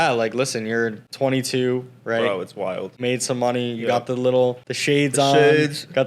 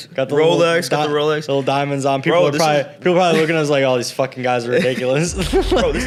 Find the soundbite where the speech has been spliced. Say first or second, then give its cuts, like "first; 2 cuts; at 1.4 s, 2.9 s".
first; 3 cuts; at 1.0 s, 3.0 s, 4.7 s